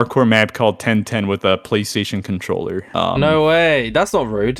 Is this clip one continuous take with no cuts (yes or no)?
yes